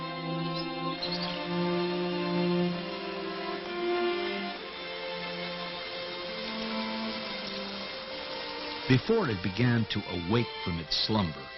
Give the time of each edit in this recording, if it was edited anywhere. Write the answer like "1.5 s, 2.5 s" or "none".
none